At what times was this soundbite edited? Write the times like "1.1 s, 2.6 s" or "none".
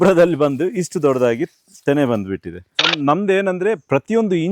2.9 s